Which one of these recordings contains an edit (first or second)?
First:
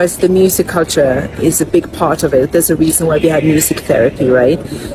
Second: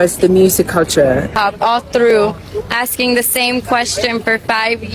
second